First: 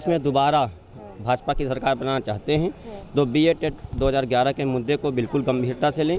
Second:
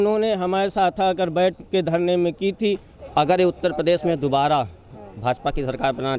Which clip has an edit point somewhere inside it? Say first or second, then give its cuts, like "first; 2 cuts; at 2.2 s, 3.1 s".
second; 1 cut; at 3.0 s